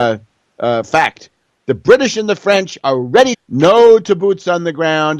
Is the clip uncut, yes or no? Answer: yes